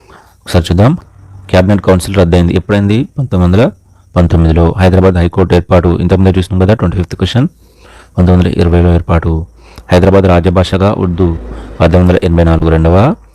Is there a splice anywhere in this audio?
no; 0 cuts

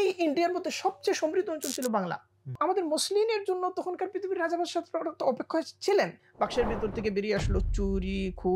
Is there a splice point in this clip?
yes; 2 cuts; at 2.6 s, 6.2 s

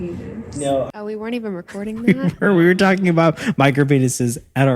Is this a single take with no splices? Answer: no; 1 cut; at 0.9 s

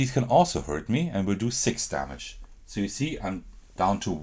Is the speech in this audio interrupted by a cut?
no; 0 cuts

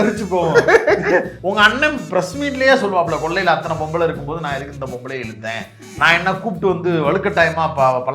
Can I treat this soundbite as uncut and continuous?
no; 1 cut; at 1.4 s

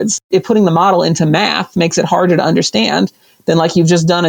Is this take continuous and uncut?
yes; 0 cuts

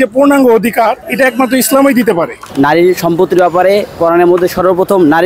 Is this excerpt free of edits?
no; 2 cuts; at 1.0 s, 2.4 s

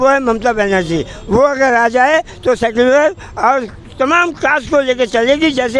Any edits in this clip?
no; 0 cuts

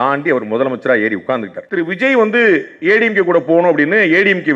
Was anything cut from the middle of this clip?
yes; 1 cut; at 1.6 s

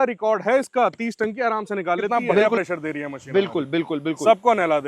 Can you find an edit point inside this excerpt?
yes; 1 cut; at 2.4 s

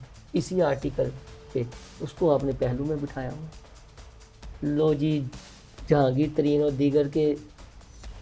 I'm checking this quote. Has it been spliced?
no; 0 cuts

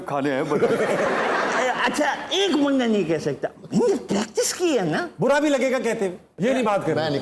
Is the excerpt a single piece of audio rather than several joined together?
no; 2 cuts; at 1.1 s, 6.3 s

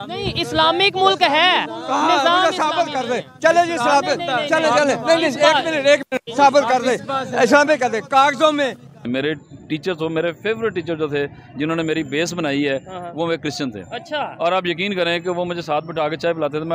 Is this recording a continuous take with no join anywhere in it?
no; 1 cut; at 9.0 s

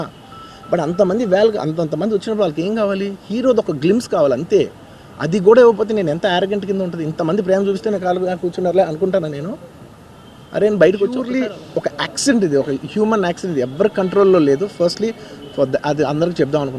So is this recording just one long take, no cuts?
no; 1 cut; at 11.3 s

